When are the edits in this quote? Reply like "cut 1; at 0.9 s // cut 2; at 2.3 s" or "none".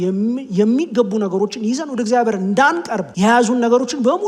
cut 1; at 3.0 s